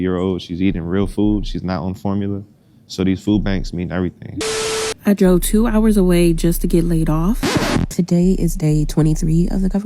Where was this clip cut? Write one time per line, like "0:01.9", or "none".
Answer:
0:04.7
0:07.9